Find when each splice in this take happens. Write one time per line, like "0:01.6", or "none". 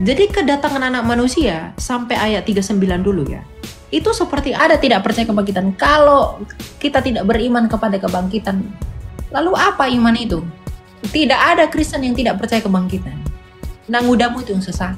0:04.6